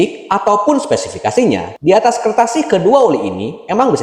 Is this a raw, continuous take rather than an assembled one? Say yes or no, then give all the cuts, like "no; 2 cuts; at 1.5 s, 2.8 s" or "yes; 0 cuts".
no; 1 cut; at 1.7 s